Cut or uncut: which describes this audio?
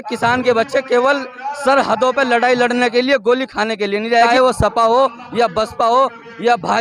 cut